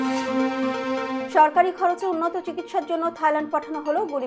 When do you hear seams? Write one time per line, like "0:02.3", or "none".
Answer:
0:01.3